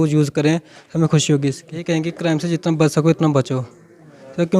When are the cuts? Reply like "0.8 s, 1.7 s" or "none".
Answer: 1.8 s